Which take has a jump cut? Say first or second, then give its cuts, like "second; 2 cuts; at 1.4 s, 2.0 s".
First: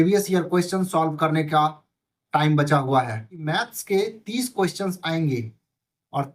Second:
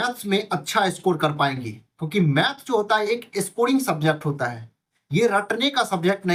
first; 1 cut; at 3.5 s